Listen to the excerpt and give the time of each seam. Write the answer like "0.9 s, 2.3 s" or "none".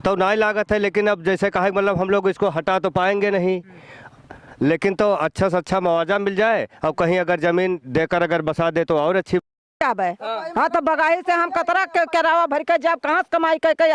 9.7 s